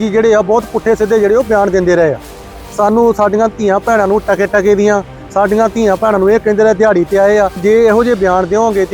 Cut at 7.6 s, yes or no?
yes